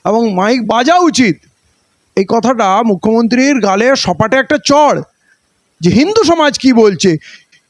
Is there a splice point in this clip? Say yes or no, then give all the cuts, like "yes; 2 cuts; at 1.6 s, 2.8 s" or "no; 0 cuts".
no; 0 cuts